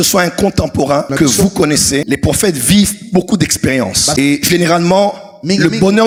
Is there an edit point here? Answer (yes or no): no